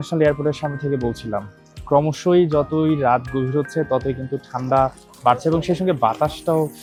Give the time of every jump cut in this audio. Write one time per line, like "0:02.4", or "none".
none